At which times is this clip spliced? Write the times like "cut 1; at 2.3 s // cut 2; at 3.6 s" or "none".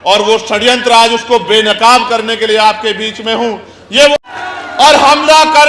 cut 1; at 4.1 s